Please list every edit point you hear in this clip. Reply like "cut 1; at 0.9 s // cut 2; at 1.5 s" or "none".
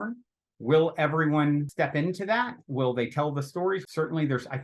cut 1; at 1.7 s // cut 2; at 3.9 s